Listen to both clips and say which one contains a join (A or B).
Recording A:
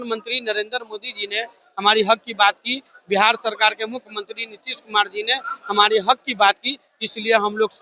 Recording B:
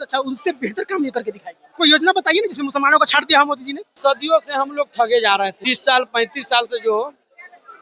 B